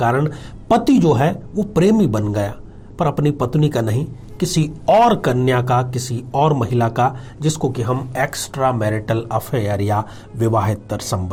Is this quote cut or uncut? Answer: uncut